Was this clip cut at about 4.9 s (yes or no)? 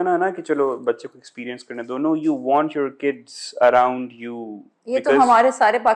no